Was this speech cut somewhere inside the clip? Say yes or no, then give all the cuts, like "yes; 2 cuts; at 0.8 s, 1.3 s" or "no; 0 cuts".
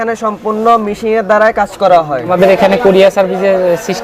yes; 1 cut; at 2.3 s